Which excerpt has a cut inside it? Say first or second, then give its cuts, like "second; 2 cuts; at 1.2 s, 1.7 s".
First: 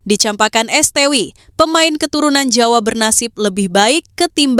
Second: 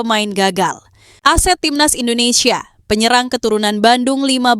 second; 1 cut; at 1.0 s